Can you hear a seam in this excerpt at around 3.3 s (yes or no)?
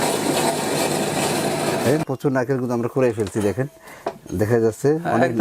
no